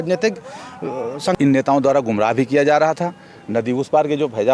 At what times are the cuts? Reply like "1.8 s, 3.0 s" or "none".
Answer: 1.3 s